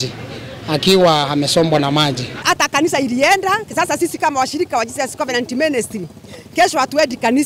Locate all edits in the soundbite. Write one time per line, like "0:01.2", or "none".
0:02.4